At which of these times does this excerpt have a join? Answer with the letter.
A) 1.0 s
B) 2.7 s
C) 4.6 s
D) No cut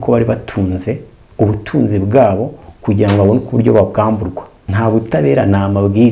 C